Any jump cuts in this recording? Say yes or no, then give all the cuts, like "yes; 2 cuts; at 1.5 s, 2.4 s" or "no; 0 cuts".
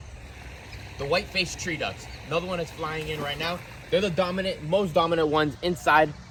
no; 0 cuts